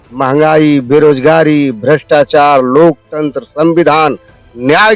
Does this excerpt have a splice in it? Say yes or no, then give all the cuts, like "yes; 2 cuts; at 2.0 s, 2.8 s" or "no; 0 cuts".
no; 0 cuts